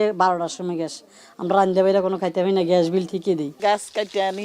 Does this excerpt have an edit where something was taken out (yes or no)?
yes